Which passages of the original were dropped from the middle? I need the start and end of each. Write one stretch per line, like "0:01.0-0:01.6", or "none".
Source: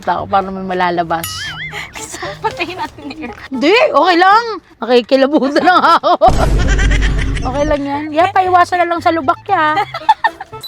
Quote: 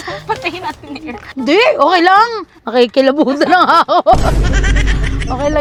none